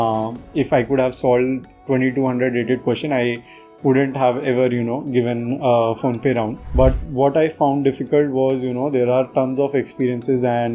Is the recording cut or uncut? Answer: cut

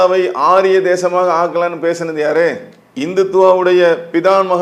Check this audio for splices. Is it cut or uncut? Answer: uncut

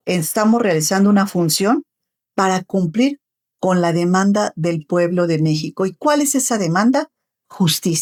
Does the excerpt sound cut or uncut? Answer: uncut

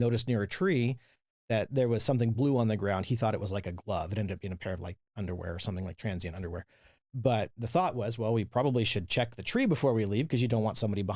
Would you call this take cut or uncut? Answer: uncut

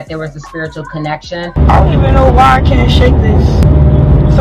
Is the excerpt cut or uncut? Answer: cut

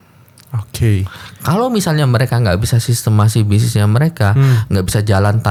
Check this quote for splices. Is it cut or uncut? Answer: uncut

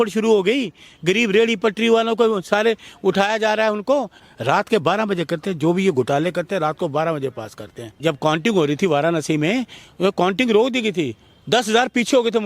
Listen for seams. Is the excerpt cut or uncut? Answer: cut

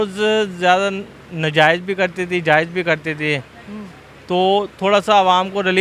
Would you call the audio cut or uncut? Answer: uncut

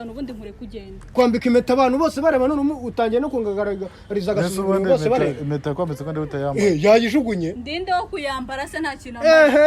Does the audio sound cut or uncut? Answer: cut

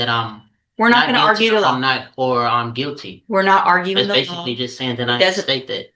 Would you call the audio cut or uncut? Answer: uncut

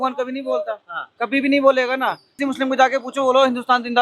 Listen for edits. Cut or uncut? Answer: cut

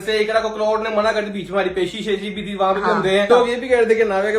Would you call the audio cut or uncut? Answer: cut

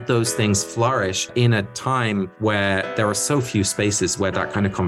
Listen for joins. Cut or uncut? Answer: uncut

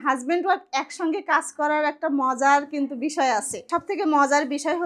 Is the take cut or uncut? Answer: cut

